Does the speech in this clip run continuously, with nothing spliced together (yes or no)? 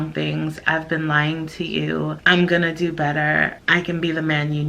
no